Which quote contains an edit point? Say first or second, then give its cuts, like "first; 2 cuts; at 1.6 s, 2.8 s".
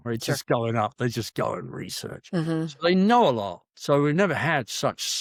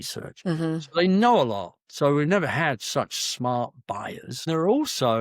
second; 1 cut; at 4.3 s